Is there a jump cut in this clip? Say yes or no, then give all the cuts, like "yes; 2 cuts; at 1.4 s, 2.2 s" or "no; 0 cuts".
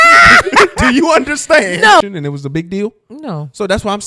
yes; 1 cut; at 2.0 s